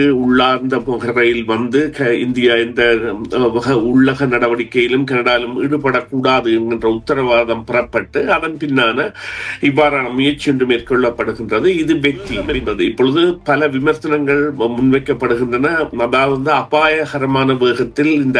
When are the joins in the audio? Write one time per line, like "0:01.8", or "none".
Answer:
0:12.5